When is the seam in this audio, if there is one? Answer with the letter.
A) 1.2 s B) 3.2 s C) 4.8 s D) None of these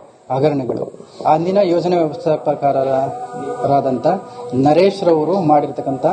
C